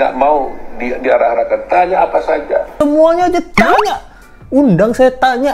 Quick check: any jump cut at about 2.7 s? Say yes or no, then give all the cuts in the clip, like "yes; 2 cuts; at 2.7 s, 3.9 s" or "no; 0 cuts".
yes; 1 cut; at 2.7 s